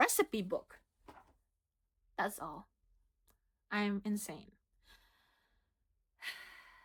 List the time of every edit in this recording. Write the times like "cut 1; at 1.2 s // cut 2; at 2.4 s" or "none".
none